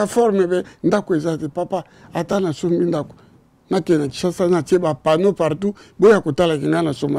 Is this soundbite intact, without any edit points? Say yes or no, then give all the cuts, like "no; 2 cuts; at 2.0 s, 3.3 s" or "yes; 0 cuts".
yes; 0 cuts